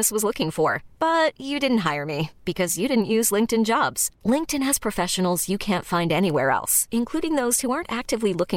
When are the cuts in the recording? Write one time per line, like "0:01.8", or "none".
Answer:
none